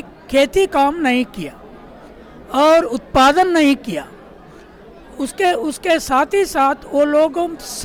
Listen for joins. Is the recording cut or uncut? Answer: uncut